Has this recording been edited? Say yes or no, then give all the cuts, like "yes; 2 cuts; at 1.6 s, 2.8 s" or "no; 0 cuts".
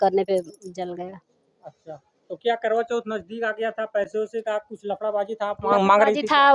no; 0 cuts